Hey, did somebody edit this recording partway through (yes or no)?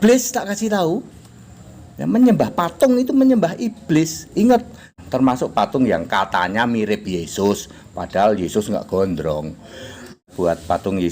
yes